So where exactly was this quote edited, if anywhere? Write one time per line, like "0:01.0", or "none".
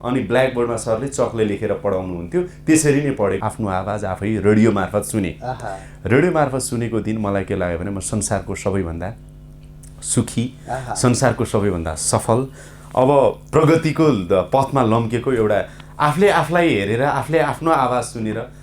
0:03.4